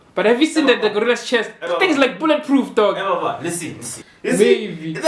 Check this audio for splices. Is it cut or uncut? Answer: cut